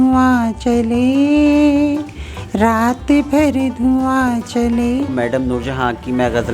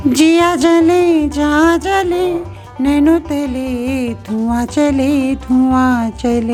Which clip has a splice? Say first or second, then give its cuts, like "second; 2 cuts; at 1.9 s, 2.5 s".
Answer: first; 1 cut; at 5.1 s